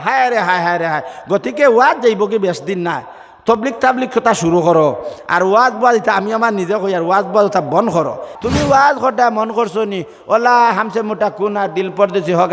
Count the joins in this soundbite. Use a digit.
1